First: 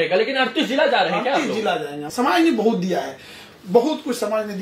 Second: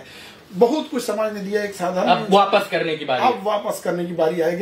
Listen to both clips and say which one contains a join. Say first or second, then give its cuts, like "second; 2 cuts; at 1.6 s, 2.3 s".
first; 1 cut; at 2.0 s